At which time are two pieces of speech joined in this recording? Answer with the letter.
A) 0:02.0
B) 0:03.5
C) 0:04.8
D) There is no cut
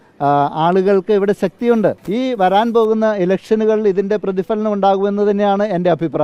A